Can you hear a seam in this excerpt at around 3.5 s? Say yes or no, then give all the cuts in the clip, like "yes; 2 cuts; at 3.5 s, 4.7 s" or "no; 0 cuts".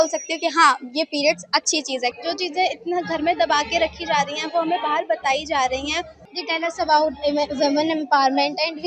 no; 2 cuts; at 2.2 s, 6.1 s